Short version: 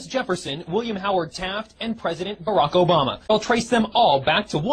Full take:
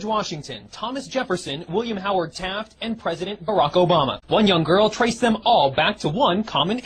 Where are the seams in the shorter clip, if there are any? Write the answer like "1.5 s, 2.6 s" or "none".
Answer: 3.3 s